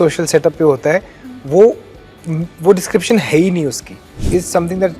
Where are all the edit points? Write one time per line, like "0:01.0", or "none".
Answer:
0:04.1